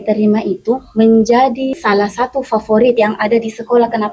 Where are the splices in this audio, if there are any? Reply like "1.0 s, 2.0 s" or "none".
1.8 s, 2.9 s